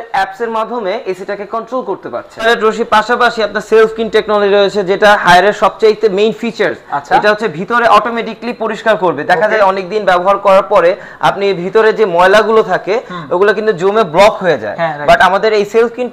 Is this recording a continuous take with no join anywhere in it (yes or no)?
no